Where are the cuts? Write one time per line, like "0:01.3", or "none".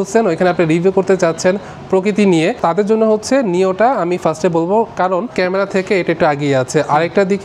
0:02.6
0:05.3